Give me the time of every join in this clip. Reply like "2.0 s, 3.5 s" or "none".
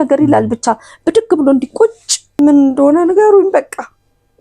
2.4 s